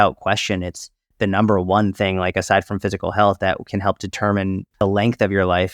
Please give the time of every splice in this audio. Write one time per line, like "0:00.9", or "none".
0:04.7

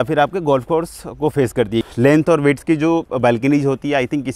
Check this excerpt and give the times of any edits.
0:01.9

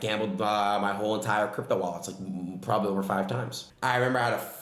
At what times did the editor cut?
0:03.6

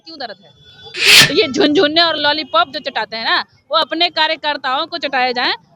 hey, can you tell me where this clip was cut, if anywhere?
0:01.1

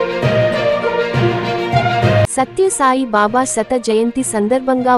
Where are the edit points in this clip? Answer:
0:02.3

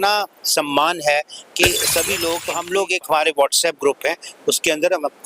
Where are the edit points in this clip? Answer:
0:02.4

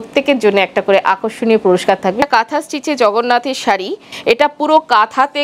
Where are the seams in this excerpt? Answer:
0:02.3
0:04.1

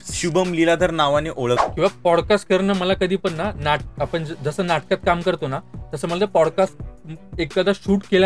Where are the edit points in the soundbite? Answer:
0:01.6

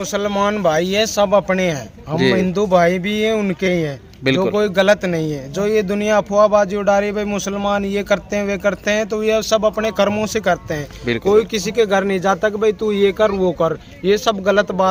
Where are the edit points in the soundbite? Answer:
none

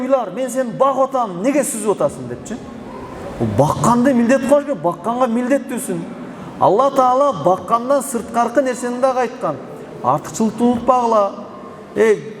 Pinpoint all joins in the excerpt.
none

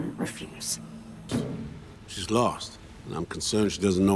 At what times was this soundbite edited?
0:01.3

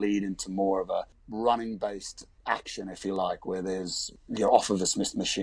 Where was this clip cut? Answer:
0:01.2
0:02.3
0:04.1

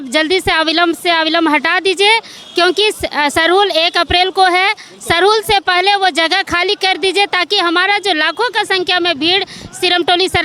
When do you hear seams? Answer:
none

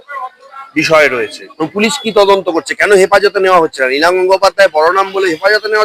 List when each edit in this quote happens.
0:01.4

